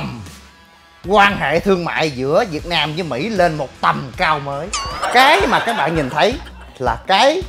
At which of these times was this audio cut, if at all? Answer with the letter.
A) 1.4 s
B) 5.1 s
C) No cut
B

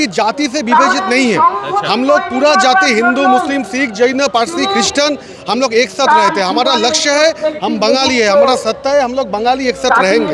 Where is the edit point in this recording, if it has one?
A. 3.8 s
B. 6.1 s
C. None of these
C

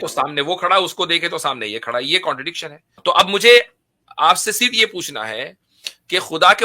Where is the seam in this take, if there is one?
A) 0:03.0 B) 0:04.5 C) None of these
A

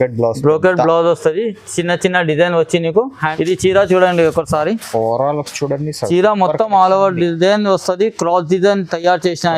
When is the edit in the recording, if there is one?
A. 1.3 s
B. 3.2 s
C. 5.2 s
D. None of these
B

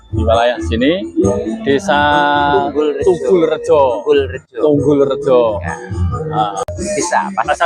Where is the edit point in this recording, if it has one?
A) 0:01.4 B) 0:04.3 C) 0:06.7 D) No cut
C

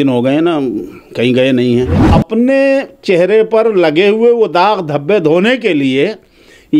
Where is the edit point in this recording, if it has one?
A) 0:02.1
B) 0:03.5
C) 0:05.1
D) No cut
A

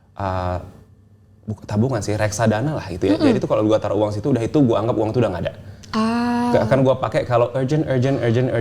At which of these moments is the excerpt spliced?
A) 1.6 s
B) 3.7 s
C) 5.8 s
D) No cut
D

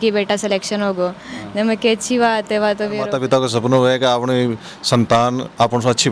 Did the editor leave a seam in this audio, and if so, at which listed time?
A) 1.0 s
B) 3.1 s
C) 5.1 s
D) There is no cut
B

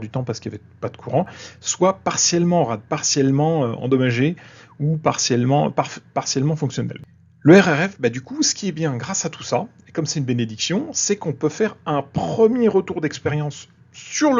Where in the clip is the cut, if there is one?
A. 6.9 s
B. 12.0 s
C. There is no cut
A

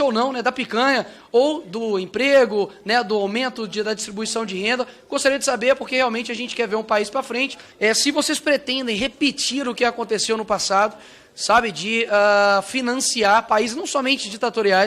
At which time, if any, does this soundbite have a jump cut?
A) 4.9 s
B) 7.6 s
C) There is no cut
B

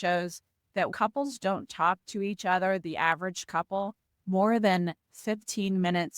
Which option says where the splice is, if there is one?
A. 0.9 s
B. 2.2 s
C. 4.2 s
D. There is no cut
A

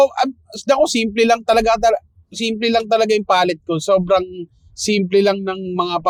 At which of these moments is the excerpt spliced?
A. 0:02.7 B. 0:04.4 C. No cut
C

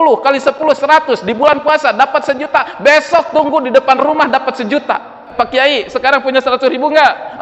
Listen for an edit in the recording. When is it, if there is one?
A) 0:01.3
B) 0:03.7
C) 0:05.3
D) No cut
C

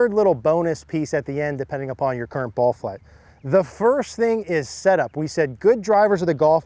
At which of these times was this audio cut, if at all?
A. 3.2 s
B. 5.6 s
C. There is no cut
C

